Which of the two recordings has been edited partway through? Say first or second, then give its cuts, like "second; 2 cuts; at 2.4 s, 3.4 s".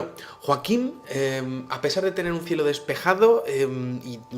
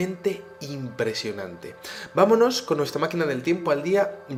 first; 1 cut; at 3.2 s